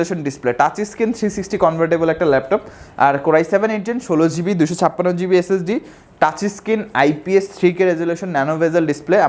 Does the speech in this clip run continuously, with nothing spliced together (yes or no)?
yes